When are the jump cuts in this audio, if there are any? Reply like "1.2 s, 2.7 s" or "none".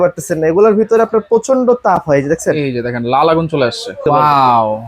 4.0 s